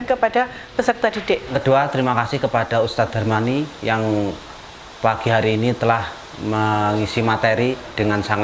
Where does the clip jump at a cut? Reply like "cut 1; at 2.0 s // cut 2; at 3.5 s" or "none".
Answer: cut 1; at 1.5 s